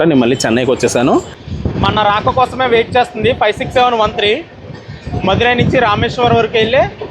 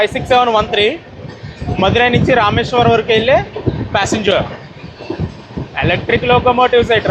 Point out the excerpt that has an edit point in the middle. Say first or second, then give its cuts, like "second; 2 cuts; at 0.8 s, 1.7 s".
first; 1 cut; at 1.4 s